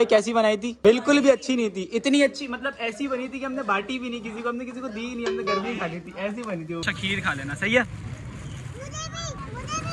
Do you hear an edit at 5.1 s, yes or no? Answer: no